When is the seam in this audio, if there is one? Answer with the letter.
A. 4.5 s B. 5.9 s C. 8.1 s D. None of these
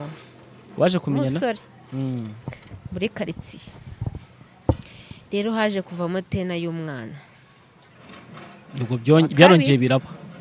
A